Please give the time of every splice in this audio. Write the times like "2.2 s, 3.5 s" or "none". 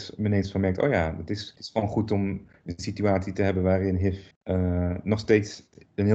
1.5 s, 4.3 s